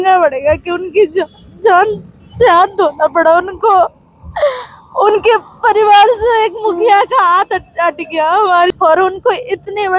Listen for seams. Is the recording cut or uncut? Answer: cut